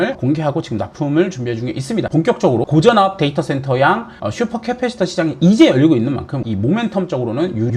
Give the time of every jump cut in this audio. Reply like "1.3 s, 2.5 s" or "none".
2.4 s, 6.4 s